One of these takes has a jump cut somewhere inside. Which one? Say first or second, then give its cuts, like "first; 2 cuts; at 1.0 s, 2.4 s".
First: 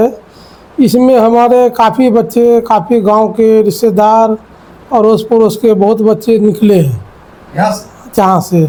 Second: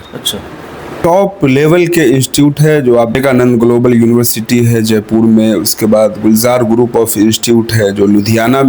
second; 2 cuts; at 1.0 s, 3.2 s